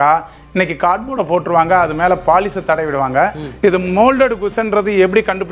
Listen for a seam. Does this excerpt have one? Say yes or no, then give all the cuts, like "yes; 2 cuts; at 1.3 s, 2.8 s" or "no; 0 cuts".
yes; 1 cut; at 3.4 s